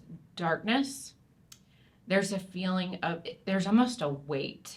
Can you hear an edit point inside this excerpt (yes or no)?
no